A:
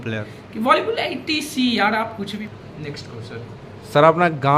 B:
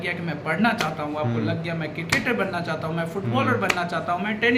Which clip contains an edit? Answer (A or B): A